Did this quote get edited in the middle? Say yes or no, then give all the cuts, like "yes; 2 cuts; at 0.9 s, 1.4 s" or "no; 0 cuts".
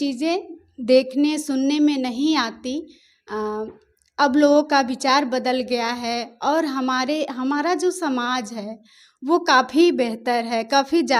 no; 0 cuts